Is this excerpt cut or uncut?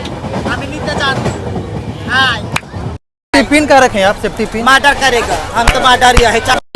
uncut